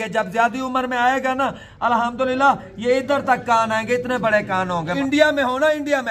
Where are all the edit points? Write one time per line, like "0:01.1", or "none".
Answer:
0:05.0